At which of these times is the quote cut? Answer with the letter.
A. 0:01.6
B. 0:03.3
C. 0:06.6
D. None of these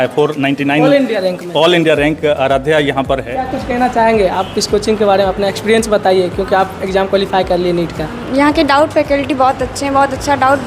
B